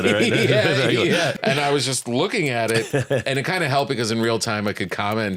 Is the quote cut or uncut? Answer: cut